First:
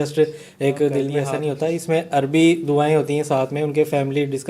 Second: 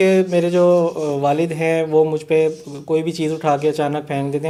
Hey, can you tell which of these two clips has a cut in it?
first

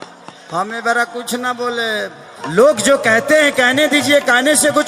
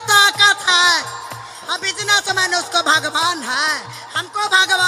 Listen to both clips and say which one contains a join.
first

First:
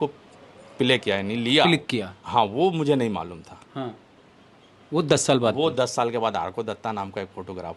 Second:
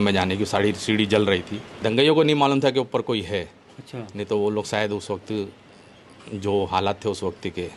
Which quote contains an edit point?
second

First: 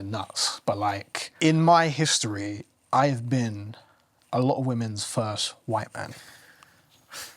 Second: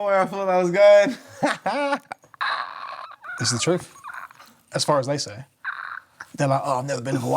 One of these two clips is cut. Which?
first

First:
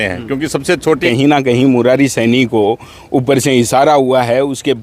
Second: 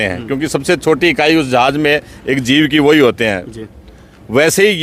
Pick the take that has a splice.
first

